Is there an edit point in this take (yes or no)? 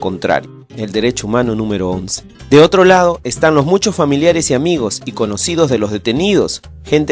no